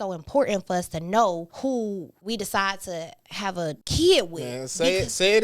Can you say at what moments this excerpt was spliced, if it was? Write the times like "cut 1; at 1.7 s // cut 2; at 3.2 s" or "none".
cut 1; at 1.9 s // cut 2; at 3.8 s